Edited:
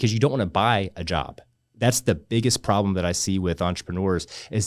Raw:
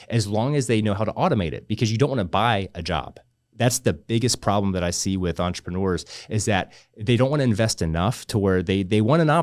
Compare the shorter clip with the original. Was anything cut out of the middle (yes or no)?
no